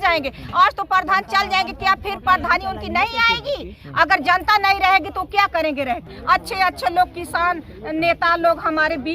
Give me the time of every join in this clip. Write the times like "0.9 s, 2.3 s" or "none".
6.2 s

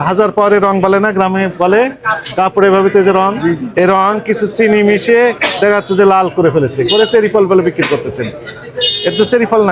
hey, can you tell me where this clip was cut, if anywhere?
none

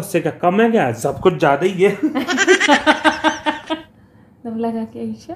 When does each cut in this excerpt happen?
3.6 s

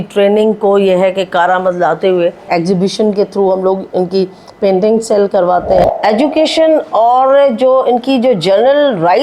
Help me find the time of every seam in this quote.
2.5 s, 5.8 s

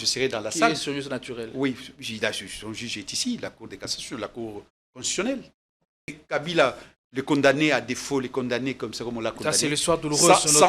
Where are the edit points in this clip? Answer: 6.2 s

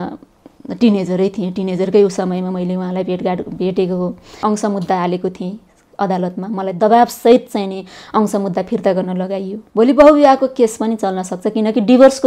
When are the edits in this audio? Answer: 4.4 s, 9.6 s

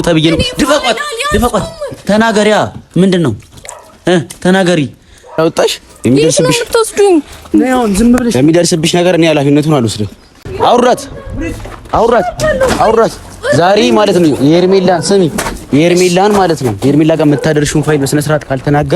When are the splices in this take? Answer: 5.4 s

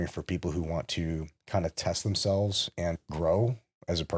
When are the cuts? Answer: 2.9 s

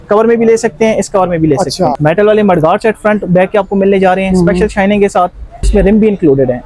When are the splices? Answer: 2.0 s, 5.7 s

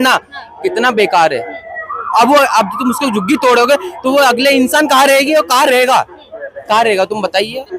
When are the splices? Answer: none

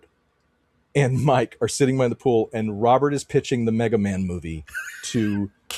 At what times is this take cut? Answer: none

